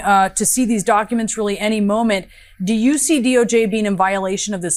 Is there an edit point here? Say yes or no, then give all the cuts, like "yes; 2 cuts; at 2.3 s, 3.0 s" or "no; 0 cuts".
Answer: no; 0 cuts